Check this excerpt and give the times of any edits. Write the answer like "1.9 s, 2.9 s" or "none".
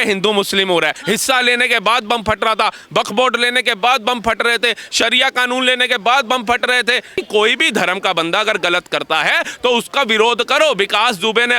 1.0 s, 7.1 s

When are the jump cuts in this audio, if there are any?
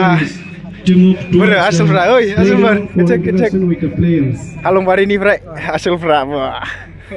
none

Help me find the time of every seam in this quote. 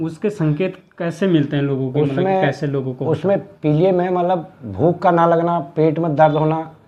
none

